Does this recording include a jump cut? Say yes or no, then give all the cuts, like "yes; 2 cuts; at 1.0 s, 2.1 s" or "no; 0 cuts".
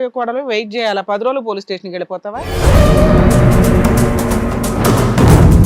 yes; 1 cut; at 2.4 s